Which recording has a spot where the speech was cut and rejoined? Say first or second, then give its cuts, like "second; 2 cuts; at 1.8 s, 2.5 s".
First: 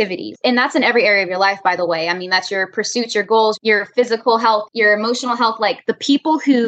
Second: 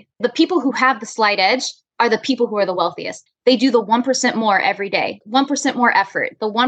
second; 1 cut; at 5.2 s